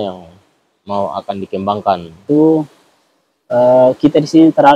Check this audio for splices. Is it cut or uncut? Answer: cut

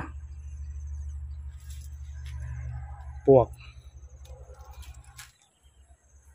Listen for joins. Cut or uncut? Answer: cut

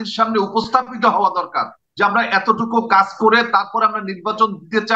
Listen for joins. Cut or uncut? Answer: uncut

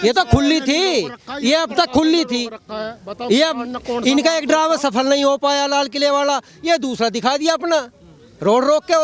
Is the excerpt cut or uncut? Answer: uncut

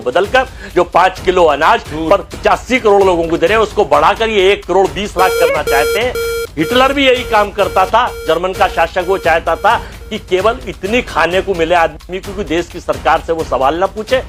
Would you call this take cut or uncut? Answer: uncut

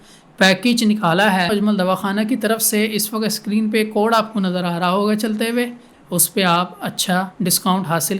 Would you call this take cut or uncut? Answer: cut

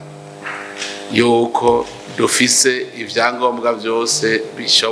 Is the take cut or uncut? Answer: uncut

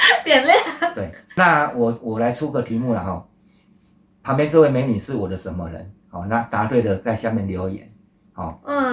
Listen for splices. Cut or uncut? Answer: cut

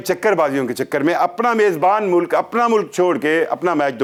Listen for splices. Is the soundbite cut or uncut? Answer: uncut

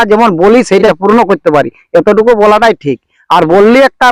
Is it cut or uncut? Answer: cut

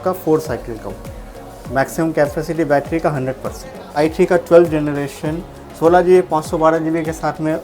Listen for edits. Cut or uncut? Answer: cut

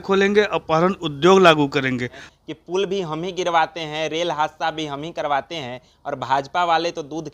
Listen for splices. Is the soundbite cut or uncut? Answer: cut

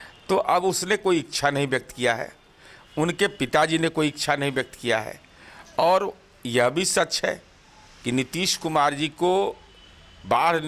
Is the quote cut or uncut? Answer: uncut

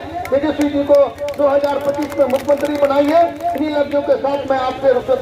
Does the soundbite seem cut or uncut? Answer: uncut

